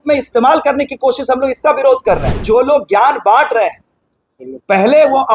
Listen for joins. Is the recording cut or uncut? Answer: cut